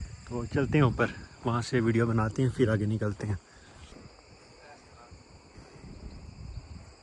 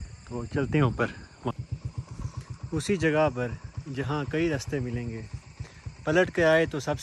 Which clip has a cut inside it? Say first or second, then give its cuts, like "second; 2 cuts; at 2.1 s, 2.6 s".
second; 1 cut; at 1.5 s